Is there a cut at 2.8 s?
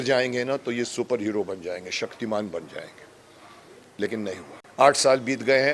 no; 1 cut; at 4.6 s

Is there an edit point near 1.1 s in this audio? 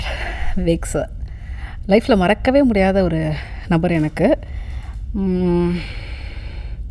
no; 0 cuts

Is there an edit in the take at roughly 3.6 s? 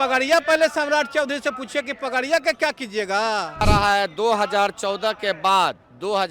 yes; 1 cut; at 3.6 s

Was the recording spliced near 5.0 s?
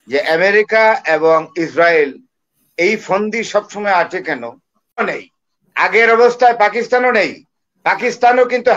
yes; 1 cut; at 5.0 s

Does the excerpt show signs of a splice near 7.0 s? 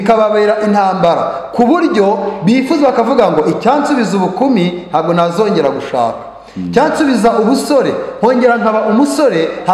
no; 0 cuts

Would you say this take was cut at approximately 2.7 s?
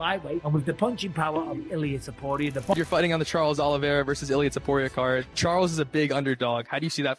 yes; 1 cut; at 2.7 s

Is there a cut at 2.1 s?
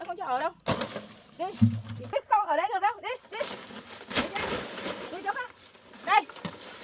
yes; 1 cut; at 2.1 s

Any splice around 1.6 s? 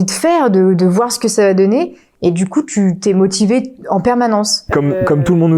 no; 1 cut; at 4.7 s

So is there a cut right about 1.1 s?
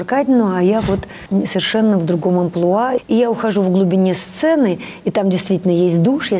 yes; 2 cuts; at 1.1 s, 3.0 s

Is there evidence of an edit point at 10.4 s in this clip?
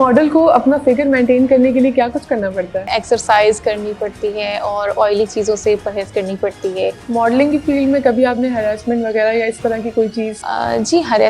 yes; 3 cuts; at 2.9 s, 7.0 s, 10.4 s

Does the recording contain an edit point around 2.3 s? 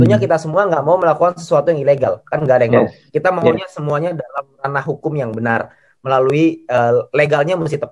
no; 0 cuts

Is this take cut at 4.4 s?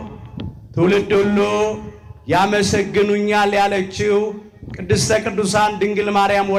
no; 0 cuts

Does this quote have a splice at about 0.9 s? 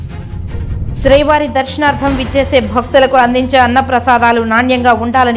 yes; 1 cut; at 0.9 s

